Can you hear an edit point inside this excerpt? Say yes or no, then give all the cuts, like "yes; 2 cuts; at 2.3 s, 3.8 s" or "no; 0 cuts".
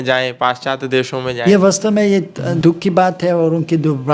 yes; 2 cuts; at 1.3 s, 2.4 s